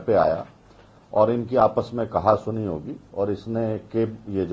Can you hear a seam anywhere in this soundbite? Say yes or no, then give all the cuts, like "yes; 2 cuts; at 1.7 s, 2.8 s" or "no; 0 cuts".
no; 0 cuts